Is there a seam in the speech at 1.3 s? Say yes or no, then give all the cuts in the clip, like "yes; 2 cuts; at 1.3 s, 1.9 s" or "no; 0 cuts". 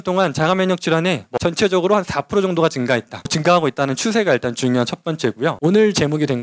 yes; 3 cuts; at 1.3 s, 3.3 s, 5.6 s